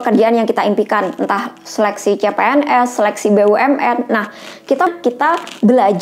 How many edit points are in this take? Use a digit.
1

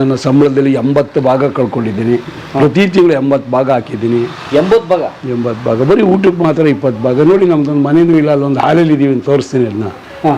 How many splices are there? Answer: 0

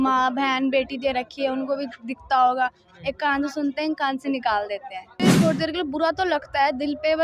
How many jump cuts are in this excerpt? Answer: 1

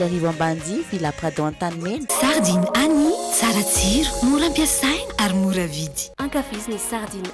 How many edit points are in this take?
1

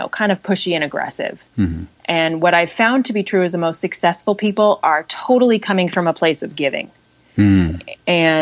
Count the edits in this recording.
0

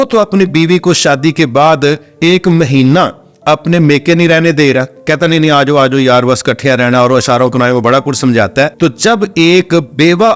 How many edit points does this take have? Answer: 1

